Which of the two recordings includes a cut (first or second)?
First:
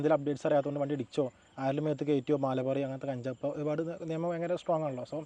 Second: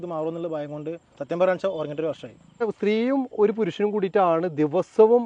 second